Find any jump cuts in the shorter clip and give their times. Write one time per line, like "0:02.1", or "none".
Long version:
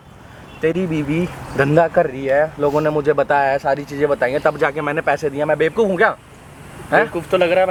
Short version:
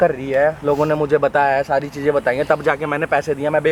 none